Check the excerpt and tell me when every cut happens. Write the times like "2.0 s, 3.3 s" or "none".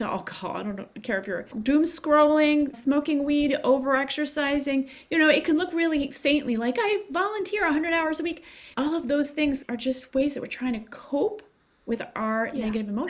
1.5 s, 9.6 s